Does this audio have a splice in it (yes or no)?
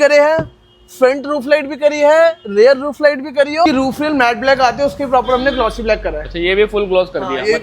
yes